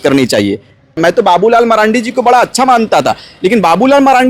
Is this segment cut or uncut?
cut